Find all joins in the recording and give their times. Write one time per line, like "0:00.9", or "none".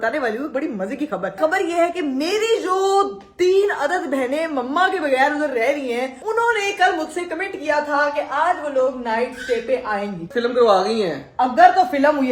0:01.4
0:06.2
0:10.2